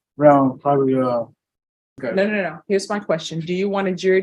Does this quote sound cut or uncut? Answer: cut